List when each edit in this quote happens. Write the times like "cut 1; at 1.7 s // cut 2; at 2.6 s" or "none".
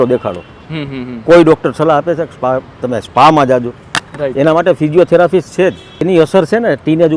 cut 1; at 6.0 s